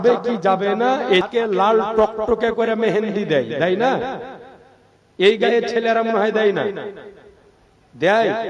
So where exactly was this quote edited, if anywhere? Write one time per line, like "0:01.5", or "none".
0:01.3